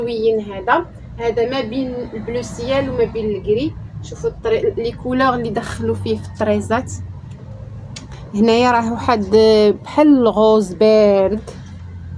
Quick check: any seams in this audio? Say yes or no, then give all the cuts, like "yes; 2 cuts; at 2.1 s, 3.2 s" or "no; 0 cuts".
no; 0 cuts